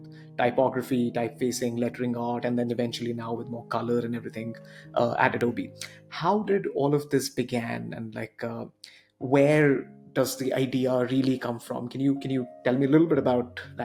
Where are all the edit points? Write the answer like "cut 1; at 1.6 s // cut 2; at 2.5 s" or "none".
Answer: none